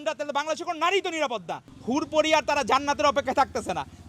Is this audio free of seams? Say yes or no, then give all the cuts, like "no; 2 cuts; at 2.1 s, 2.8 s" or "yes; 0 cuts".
no; 1 cut; at 1.7 s